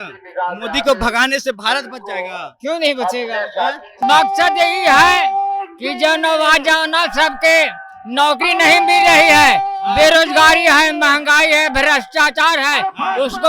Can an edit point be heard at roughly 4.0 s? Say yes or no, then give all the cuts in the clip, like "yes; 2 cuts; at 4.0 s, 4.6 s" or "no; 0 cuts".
yes; 1 cut; at 4.0 s